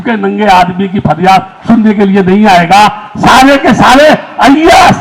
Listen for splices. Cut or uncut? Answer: uncut